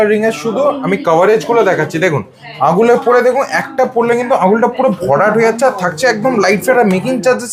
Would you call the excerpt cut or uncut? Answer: uncut